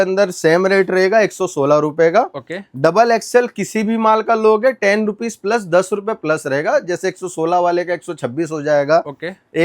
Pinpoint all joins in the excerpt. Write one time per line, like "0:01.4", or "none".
none